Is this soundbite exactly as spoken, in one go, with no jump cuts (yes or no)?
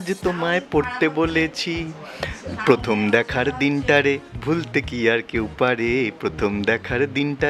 yes